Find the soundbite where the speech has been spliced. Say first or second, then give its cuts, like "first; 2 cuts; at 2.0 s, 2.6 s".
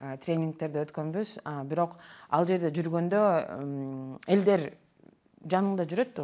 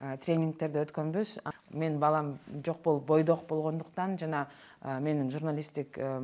second; 1 cut; at 1.5 s